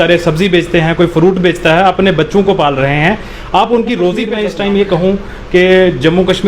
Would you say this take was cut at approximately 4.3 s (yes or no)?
yes